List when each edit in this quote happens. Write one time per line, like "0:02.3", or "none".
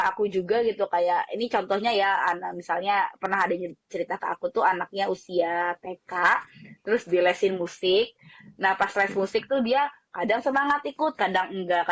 none